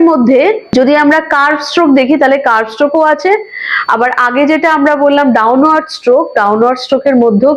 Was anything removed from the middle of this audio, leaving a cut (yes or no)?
no